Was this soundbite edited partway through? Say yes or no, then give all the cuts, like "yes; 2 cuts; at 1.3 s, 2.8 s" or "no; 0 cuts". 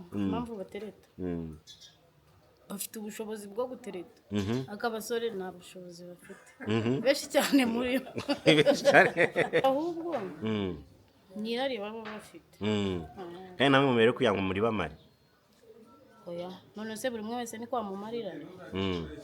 yes; 1 cut; at 9.6 s